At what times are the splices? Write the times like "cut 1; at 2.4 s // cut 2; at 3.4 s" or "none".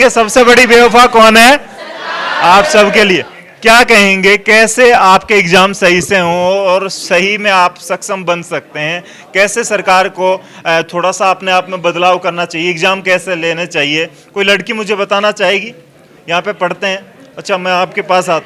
none